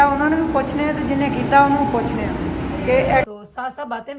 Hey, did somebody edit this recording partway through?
yes; 1 cut; at 3.2 s

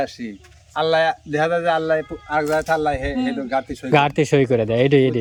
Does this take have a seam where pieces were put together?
no; 0 cuts

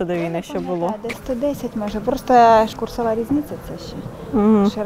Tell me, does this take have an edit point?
yes; 1 cut; at 2.7 s

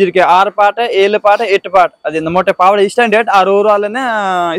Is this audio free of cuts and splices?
yes; 0 cuts

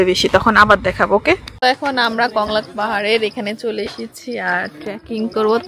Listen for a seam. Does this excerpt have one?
yes; 1 cut; at 1.6 s

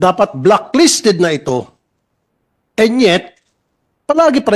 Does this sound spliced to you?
no; 0 cuts

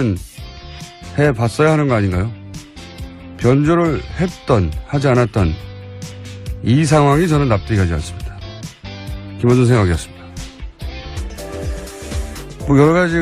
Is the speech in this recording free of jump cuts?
no; 1 cut; at 5.3 s

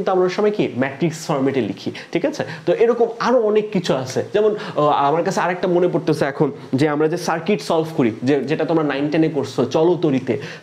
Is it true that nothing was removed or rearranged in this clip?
yes; 0 cuts

